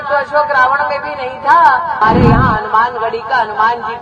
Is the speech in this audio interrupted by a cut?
yes; 1 cut; at 2.0 s

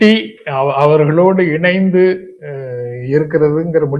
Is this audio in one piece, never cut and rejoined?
yes; 0 cuts

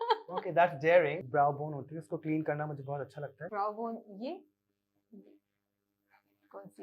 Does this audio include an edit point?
yes; 2 cuts; at 1.2 s, 3.4 s

